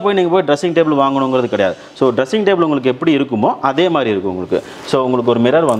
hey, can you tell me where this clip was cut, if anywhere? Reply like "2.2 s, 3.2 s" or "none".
none